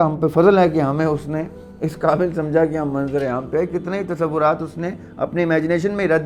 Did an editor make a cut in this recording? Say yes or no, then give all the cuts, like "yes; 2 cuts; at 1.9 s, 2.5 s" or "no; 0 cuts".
no; 0 cuts